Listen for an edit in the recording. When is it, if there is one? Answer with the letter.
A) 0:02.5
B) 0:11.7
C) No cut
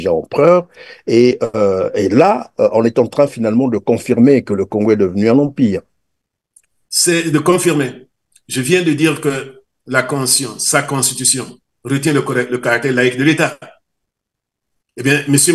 C